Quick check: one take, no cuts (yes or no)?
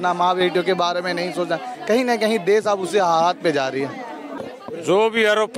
no